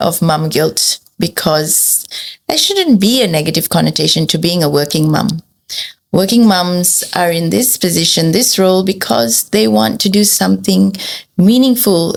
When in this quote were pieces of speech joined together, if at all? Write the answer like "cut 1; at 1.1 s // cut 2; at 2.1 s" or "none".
none